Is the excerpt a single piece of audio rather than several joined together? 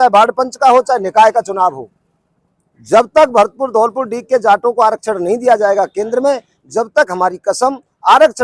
yes; 0 cuts

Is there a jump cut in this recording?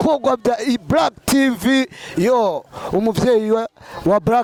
no; 0 cuts

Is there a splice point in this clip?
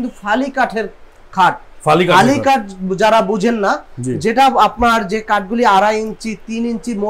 no; 0 cuts

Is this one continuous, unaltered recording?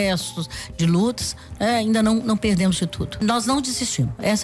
no; 1 cut; at 3.2 s

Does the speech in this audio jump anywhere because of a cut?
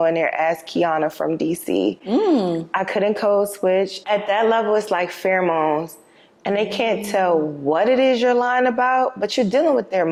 no; 0 cuts

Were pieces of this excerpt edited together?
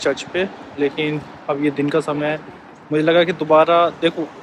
no; 0 cuts

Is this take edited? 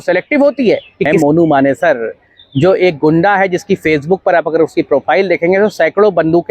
yes; 1 cut; at 1.1 s

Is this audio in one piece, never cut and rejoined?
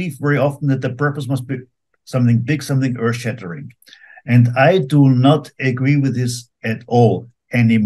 yes; 0 cuts

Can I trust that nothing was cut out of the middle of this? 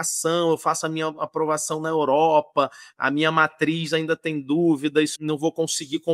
no; 1 cut; at 5.1 s

